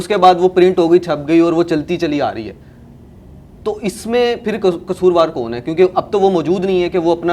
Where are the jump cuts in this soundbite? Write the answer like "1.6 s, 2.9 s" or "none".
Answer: none